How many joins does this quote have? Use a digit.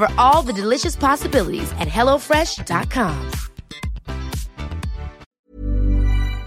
1